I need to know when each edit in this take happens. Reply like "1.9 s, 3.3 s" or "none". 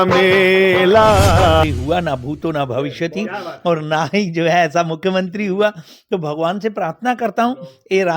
1.6 s